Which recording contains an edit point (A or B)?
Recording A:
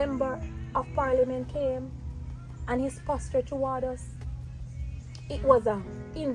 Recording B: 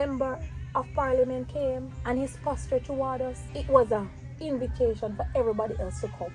B